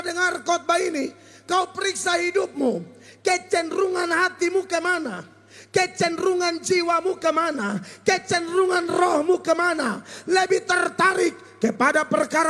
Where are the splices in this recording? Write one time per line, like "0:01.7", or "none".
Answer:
none